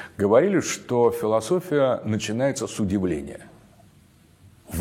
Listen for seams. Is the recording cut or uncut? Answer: uncut